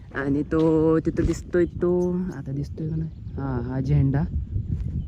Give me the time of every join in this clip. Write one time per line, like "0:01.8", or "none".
none